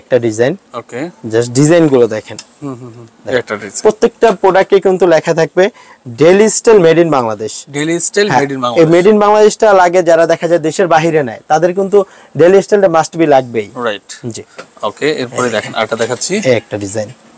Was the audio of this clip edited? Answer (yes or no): no